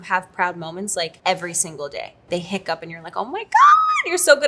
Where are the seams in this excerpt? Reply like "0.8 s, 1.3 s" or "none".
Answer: 1.2 s, 2.1 s

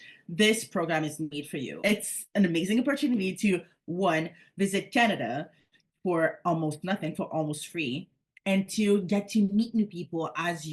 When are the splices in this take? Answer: 1.7 s

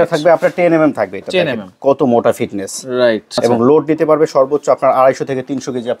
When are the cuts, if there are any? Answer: 3.3 s

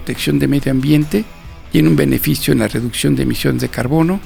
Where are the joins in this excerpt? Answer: none

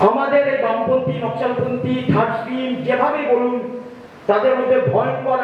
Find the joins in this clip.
none

